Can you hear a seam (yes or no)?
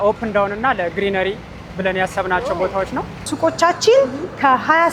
yes